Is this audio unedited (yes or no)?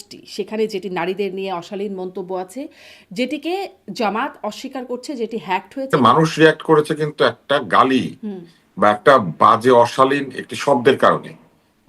no